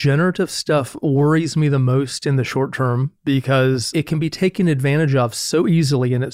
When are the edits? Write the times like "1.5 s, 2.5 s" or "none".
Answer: 3.8 s